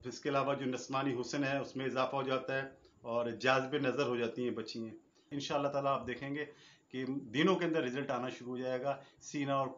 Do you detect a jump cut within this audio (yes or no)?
yes